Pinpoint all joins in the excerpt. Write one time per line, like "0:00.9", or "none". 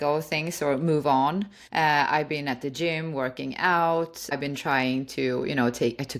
0:01.6
0:04.4